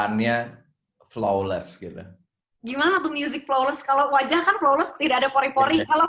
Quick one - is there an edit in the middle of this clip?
no; 0 cuts

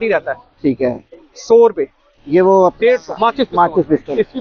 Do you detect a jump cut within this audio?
no; 0 cuts

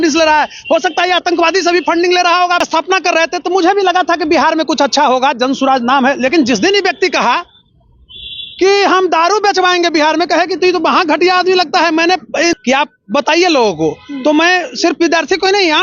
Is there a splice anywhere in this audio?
yes; 2 cuts; at 2.6 s, 12.5 s

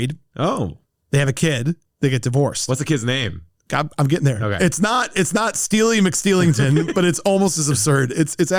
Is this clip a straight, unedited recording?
yes; 0 cuts

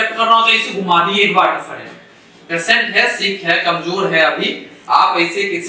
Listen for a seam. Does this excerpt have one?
no; 0 cuts

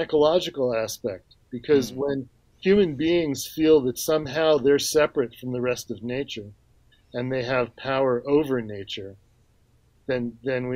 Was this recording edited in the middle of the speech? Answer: no; 0 cuts

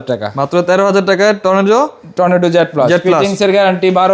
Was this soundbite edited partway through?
no; 0 cuts

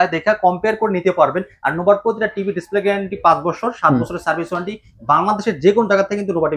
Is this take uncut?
yes; 0 cuts

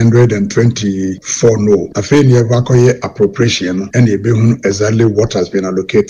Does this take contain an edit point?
yes; 3 cuts; at 1.2 s, 1.9 s, 3.9 s

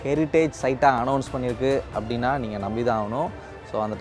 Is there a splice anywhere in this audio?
no; 0 cuts

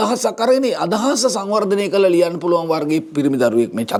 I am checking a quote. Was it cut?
no; 0 cuts

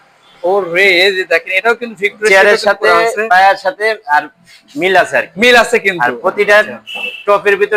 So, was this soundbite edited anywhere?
no; 0 cuts

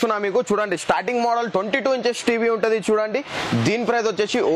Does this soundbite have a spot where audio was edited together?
no; 0 cuts

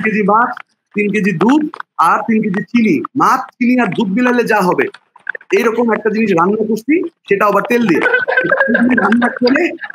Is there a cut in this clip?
no; 0 cuts

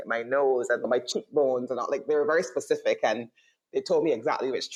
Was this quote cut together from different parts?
no; 0 cuts

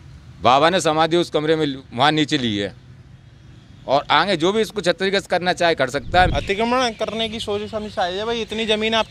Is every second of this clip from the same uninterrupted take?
no; 1 cut; at 6.3 s

